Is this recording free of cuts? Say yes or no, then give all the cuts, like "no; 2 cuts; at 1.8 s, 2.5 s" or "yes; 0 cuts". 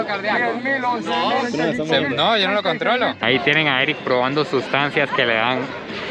no; 2 cuts; at 1.5 s, 3.2 s